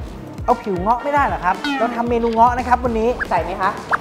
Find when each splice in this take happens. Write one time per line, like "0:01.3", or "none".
none